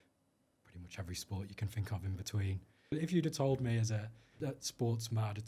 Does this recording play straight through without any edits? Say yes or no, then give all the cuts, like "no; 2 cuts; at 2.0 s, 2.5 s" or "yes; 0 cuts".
no; 2 cuts; at 2.9 s, 4.3 s